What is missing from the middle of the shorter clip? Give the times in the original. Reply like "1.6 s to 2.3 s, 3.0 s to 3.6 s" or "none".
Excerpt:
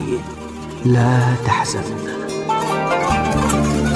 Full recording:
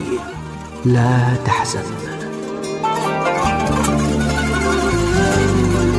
1.8 s to 2.1 s